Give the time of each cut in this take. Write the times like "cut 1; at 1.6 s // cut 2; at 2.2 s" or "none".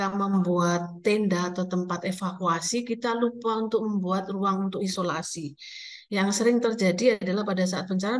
none